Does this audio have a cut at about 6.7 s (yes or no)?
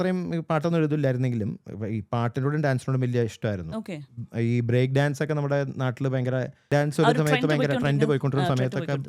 yes